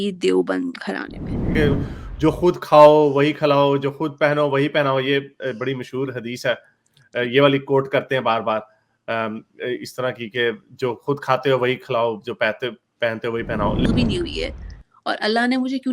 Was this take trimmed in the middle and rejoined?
yes; 2 cuts; at 1.5 s, 13.8 s

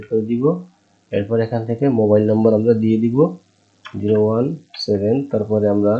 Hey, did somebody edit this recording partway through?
no; 0 cuts

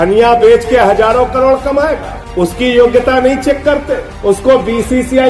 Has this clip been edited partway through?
no; 0 cuts

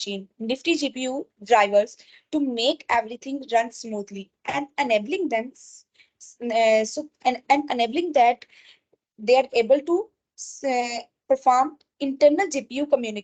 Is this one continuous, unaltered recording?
yes; 0 cuts

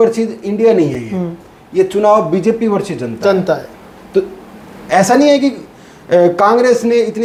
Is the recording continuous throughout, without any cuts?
yes; 0 cuts

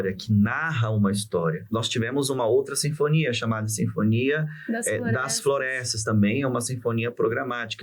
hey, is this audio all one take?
no; 1 cut; at 1.6 s

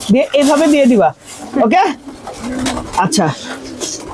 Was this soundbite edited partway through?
no; 0 cuts

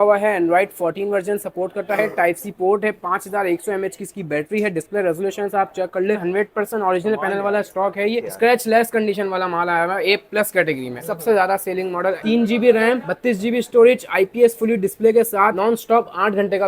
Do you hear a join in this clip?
yes; 5 cuts; at 6.2 s, 8.2 s, 11.0 s, 12.2 s, 15.5 s

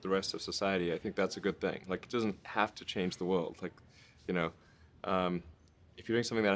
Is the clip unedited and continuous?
no; 1 cut; at 1.5 s

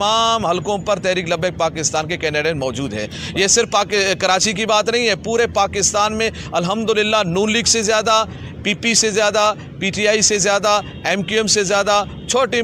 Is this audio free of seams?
yes; 0 cuts

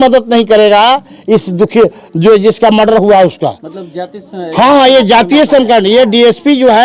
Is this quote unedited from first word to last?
yes; 0 cuts

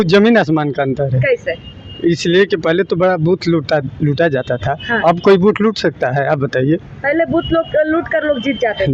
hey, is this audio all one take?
yes; 0 cuts

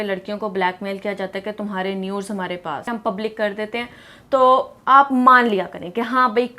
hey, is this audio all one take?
no; 1 cut; at 2.9 s

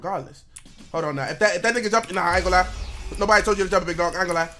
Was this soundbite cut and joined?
no; 0 cuts

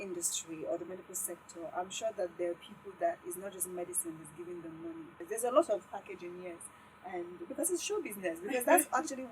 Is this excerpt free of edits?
no; 1 cut; at 5.2 s

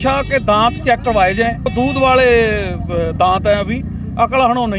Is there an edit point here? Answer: yes; 1 cut; at 1.7 s

